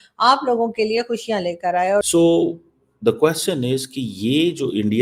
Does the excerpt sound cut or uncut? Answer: cut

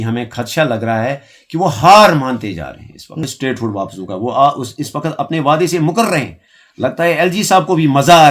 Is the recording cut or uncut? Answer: cut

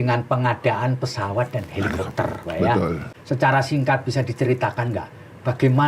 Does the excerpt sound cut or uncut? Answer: cut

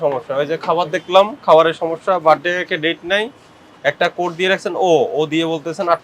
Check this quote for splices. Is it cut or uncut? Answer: uncut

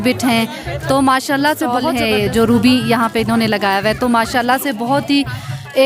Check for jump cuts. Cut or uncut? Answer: cut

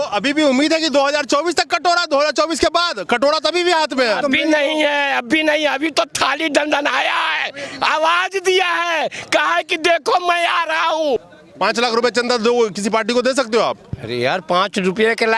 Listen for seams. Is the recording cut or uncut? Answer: cut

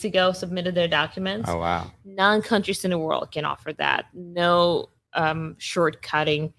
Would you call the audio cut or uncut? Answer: uncut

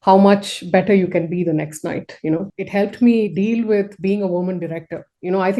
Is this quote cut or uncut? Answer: cut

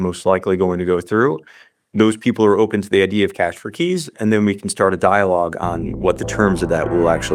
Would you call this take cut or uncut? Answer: uncut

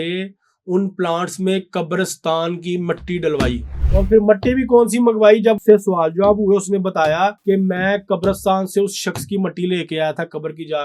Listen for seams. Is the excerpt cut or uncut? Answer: cut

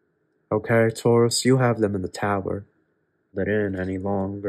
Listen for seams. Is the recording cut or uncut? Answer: cut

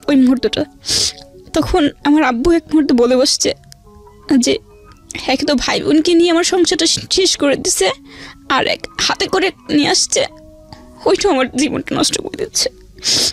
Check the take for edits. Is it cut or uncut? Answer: uncut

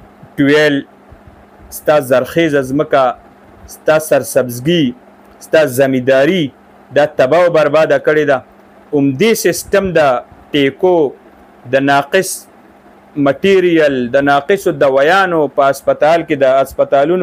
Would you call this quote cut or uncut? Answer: uncut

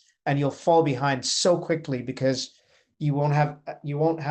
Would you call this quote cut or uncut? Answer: uncut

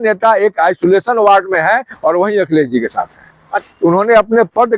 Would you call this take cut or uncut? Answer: cut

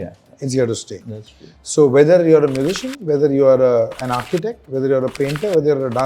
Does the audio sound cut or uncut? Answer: uncut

